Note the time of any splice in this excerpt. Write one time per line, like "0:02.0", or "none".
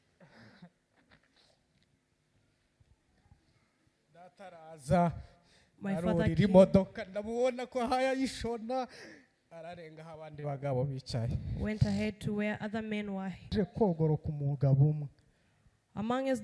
0:13.5

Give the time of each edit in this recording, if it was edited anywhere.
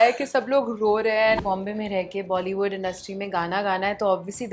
0:01.4

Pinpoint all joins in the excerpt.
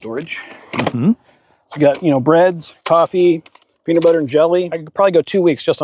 0:04.8

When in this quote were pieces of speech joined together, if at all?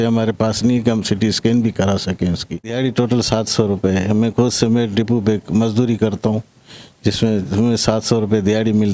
0:02.8

